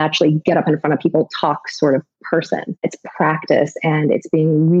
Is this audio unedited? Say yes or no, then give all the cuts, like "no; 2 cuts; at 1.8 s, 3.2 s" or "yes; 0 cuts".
no; 1 cut; at 2.8 s